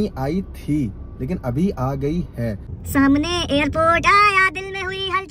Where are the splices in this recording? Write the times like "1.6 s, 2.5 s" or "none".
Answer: 2.7 s